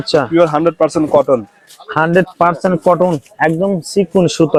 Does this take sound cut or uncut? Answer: uncut